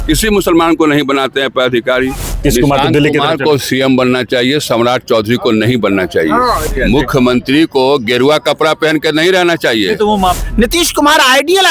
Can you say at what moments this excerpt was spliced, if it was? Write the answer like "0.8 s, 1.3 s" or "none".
2.4 s, 6.7 s, 10.4 s

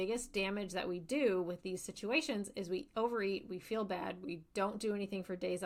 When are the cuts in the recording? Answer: none

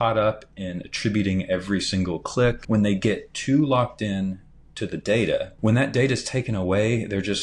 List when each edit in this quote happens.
2.6 s, 5.5 s

